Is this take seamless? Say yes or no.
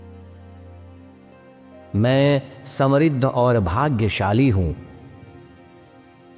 yes